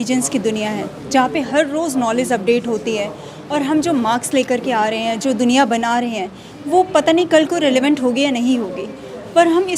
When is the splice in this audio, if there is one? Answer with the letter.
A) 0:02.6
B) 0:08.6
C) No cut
C